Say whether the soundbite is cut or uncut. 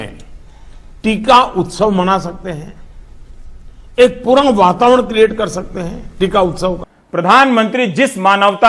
cut